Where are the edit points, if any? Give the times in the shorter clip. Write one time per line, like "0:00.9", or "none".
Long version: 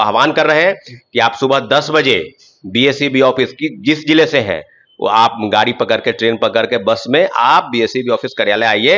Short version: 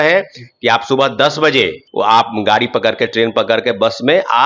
0:01.8